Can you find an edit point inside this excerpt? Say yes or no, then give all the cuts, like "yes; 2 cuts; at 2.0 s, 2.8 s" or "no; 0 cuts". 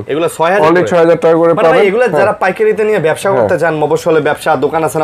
no; 0 cuts